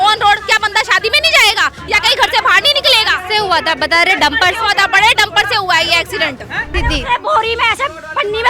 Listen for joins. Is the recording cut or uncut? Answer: cut